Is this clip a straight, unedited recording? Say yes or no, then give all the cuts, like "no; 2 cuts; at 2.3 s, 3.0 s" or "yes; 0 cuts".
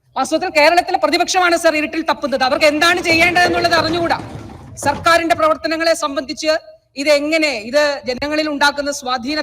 yes; 0 cuts